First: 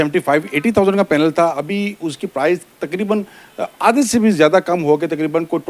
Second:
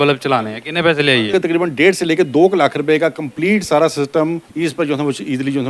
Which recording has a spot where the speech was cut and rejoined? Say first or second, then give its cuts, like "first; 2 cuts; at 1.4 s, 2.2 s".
second; 2 cuts; at 1.3 s, 4.5 s